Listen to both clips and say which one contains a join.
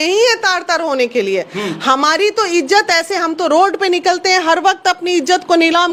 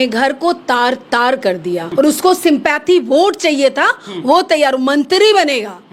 second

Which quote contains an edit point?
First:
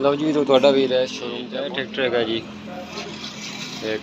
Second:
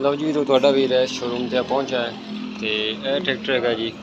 first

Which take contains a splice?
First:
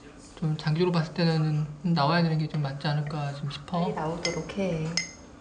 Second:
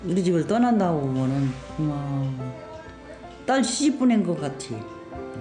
first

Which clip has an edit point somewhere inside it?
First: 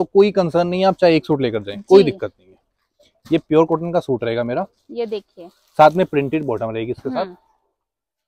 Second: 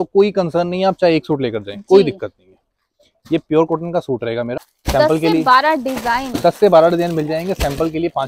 second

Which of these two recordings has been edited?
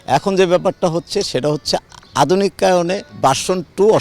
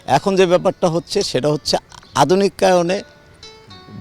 first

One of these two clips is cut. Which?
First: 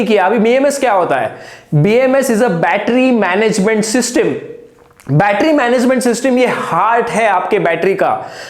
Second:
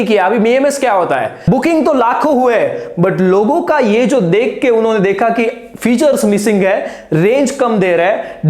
second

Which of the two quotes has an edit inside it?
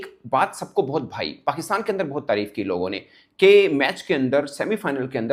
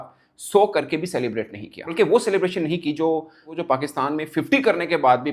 second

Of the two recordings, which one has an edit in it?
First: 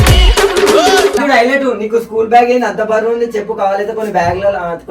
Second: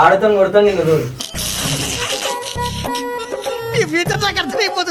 first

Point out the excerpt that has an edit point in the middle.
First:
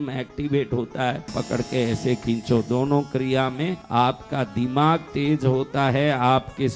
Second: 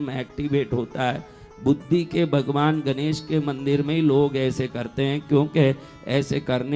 first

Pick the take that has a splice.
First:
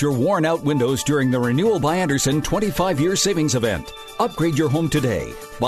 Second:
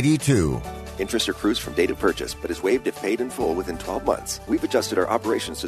second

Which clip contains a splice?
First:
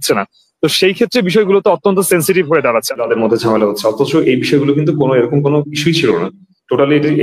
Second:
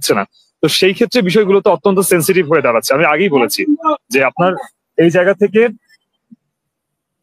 first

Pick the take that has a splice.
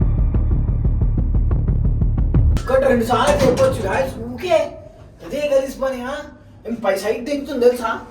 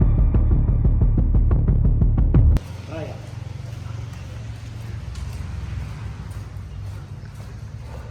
first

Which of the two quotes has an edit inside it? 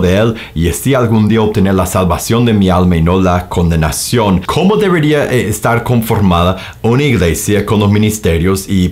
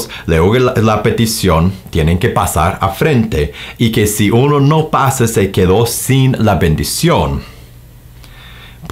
first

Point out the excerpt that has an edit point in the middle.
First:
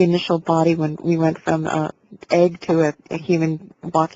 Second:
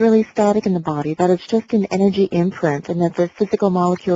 second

